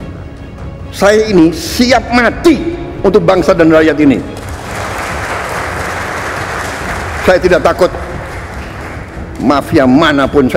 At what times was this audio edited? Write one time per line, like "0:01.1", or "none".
none